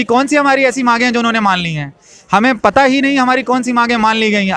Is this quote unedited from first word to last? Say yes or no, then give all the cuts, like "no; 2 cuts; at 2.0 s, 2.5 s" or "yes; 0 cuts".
yes; 0 cuts